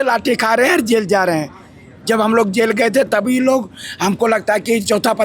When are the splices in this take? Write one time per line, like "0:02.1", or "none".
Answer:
none